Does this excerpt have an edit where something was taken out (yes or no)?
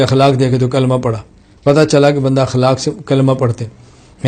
no